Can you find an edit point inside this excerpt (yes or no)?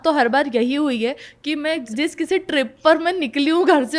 yes